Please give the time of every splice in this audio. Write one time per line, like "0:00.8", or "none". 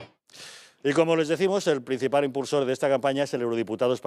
0:02.6